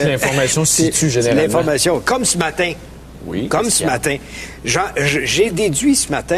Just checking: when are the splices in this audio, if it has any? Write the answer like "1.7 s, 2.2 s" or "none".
1.0 s